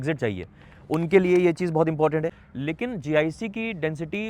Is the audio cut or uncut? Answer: cut